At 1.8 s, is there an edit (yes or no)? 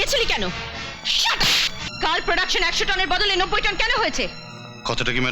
yes